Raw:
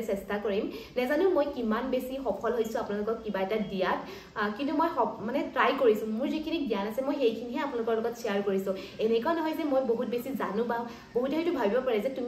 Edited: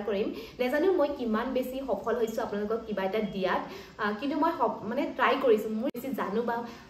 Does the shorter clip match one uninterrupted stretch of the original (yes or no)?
no